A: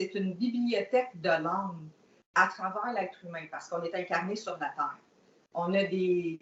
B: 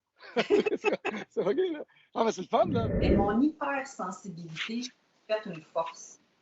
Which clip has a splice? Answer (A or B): B